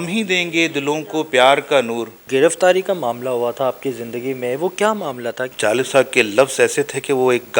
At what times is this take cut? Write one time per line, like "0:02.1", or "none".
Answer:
0:02.2
0:05.4